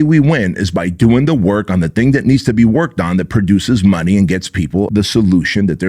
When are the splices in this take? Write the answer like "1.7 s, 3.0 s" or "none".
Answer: 4.9 s